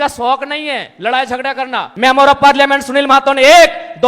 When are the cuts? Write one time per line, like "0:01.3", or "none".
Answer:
0:01.9